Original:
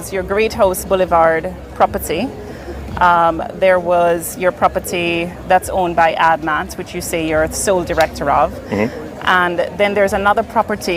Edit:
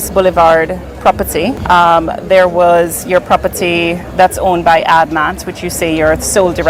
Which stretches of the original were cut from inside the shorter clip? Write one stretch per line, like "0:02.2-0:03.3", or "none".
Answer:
0:02.3-0:02.9